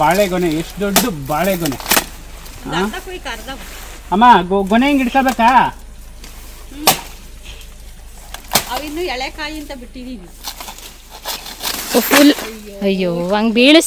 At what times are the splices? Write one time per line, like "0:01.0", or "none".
none